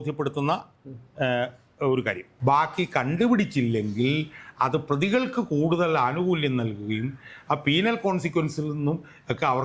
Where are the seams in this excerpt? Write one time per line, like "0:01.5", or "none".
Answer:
0:02.3